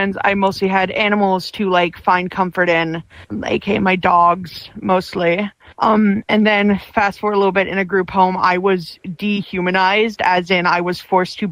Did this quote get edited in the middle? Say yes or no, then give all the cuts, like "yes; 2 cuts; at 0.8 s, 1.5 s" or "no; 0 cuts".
no; 0 cuts